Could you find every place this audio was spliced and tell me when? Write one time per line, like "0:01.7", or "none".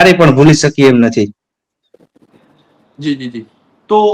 none